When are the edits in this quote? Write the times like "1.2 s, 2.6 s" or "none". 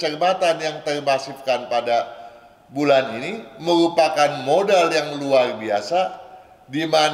none